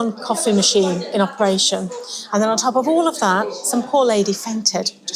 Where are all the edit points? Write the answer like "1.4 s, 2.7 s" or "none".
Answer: none